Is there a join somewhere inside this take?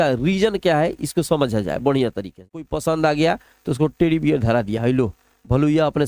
yes; 1 cut; at 2.4 s

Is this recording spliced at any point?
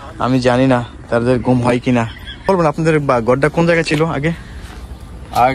yes; 1 cut; at 2.5 s

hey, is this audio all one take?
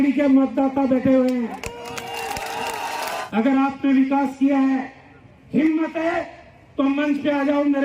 no; 1 cut; at 3.2 s

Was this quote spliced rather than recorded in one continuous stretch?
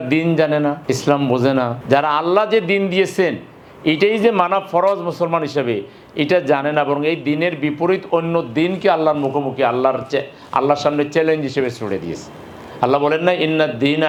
no; 0 cuts

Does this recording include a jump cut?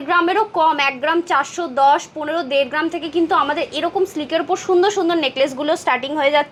no; 0 cuts

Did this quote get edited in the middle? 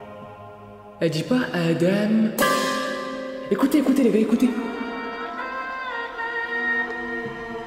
no; 0 cuts

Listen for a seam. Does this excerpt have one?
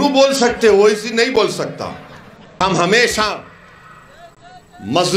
yes; 1 cut; at 2.6 s

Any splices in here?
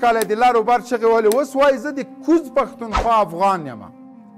no; 0 cuts

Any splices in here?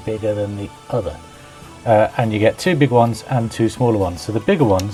no; 0 cuts

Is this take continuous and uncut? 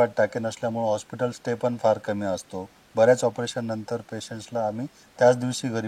yes; 0 cuts

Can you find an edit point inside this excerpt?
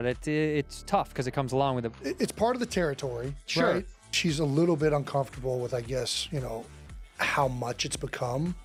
no; 0 cuts

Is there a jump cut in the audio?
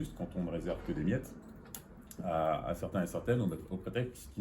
no; 0 cuts

